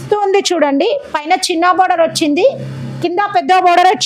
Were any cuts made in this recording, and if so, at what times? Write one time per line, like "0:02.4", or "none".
none

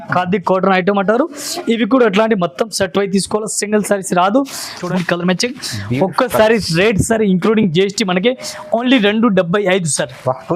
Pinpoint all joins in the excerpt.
0:04.8

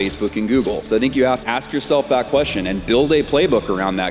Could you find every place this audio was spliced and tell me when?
0:00.8
0:01.4

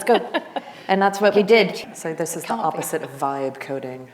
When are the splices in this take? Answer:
0:01.8

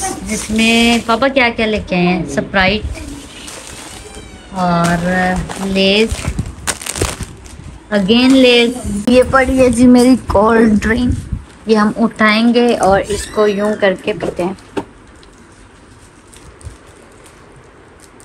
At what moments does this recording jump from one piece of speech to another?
0:08.9

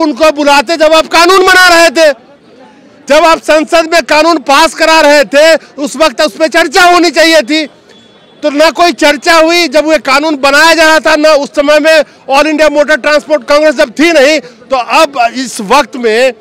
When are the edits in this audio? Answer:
none

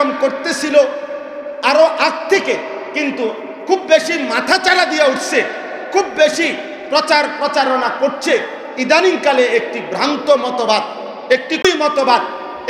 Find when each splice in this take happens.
0:11.6

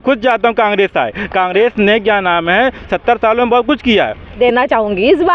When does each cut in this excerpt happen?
0:04.4

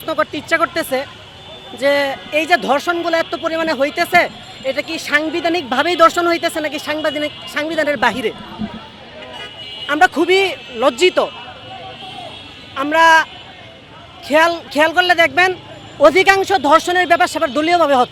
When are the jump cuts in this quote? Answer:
none

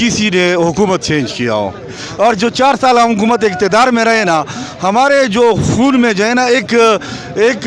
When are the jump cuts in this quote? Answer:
0:02.0

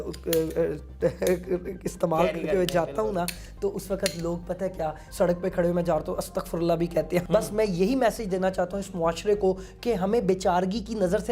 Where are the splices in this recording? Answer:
0:05.0
0:07.2

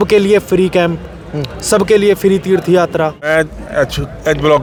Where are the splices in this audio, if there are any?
none

